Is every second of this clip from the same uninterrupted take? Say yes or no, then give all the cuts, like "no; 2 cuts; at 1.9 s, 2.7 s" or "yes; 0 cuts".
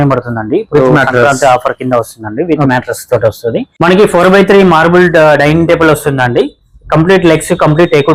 no; 1 cut; at 3.7 s